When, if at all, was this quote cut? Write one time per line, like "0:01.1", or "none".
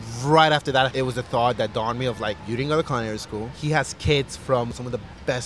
0:00.9
0:02.4
0:03.5
0:04.7